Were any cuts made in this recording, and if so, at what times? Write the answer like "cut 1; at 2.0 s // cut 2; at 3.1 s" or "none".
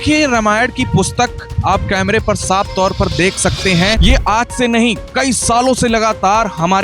cut 1; at 4.0 s